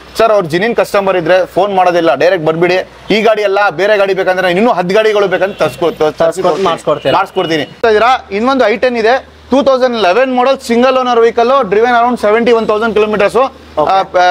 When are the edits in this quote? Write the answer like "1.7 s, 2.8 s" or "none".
7.8 s